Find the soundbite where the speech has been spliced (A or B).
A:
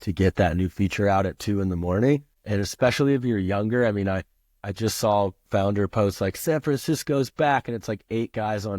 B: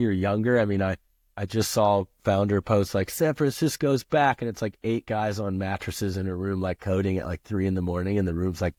A